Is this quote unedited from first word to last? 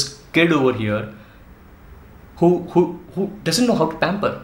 yes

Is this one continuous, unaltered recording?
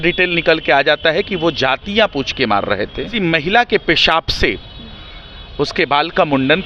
no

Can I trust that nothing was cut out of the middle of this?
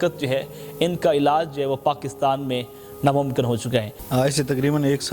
no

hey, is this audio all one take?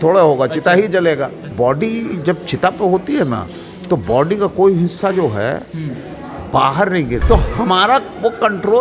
no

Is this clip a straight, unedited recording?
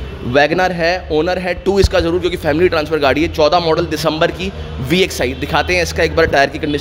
yes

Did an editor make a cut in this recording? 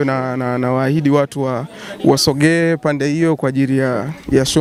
no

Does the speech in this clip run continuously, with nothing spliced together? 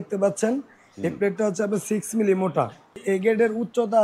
no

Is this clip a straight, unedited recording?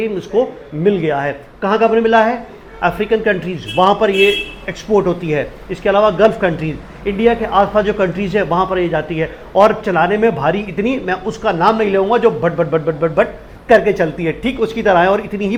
yes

